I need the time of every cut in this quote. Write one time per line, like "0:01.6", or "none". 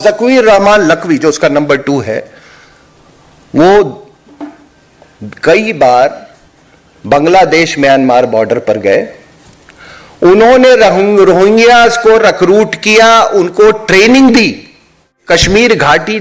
0:15.1